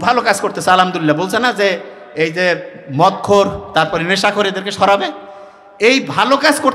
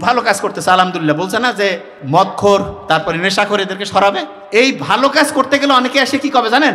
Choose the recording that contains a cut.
second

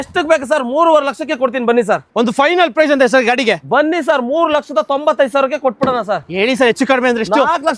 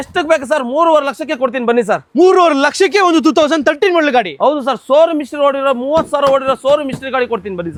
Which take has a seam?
first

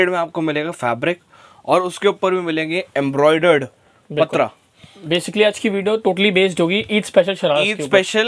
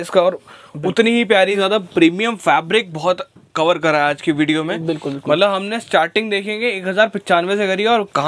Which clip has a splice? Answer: second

